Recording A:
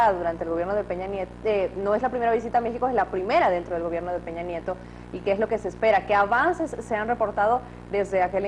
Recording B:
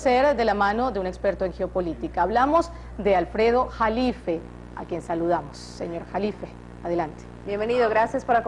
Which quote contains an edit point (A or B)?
A